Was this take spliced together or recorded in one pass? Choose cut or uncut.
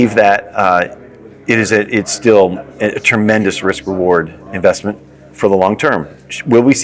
uncut